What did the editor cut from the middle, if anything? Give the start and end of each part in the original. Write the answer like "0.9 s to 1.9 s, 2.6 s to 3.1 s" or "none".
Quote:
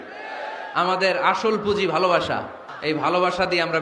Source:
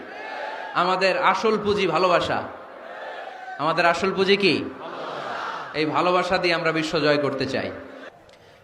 2.6 s to 5.6 s